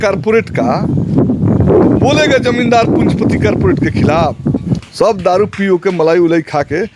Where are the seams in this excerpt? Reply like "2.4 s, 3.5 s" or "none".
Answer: 4.8 s